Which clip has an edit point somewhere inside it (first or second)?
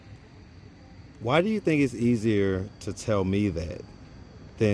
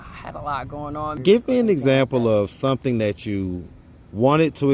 second